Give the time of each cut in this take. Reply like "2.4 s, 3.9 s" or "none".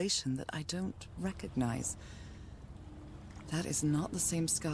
none